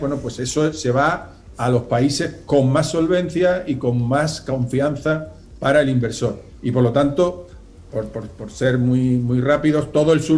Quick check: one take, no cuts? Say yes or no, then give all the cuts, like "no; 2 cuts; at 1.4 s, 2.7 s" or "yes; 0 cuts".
yes; 0 cuts